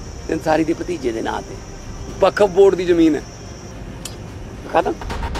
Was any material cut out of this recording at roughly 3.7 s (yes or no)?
yes